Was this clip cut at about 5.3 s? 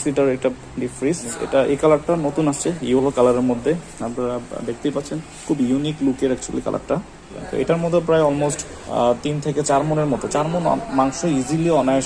yes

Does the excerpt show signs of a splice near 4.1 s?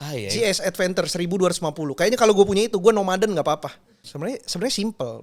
yes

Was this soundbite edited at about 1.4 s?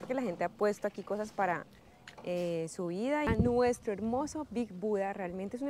no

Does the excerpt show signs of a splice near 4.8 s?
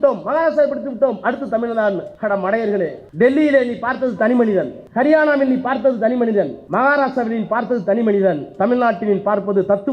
yes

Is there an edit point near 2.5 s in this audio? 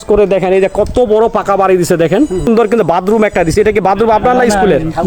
yes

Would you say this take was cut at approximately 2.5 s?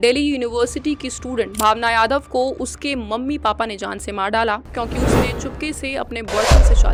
no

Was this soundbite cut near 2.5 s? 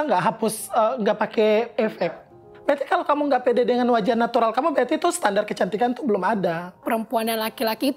yes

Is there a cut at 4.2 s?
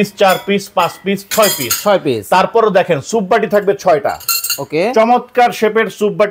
no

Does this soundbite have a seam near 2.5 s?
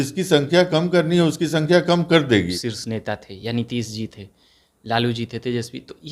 yes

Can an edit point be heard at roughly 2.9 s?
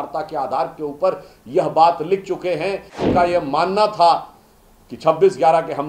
yes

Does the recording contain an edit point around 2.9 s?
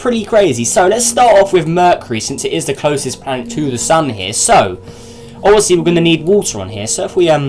yes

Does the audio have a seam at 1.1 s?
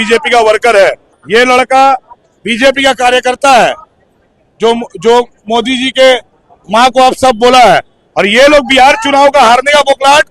yes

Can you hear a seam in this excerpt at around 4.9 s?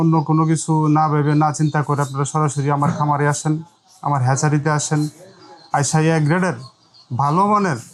no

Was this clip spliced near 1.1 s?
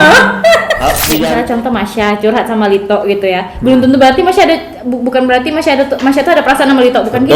yes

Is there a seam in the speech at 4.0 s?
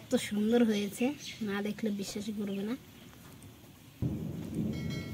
yes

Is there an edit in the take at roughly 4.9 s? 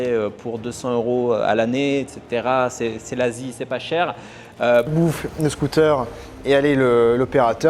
yes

